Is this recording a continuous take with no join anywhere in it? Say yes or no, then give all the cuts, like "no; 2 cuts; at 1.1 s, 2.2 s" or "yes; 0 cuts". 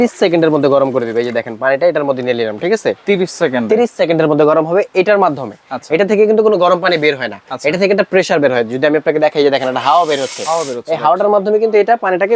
yes; 0 cuts